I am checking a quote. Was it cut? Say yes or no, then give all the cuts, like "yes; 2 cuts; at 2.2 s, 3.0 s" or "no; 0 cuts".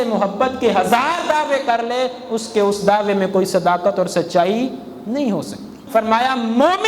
yes; 1 cut; at 5.8 s